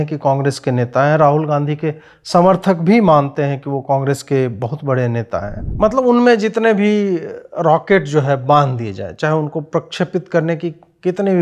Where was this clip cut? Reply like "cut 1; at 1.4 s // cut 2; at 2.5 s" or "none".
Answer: cut 1; at 5.6 s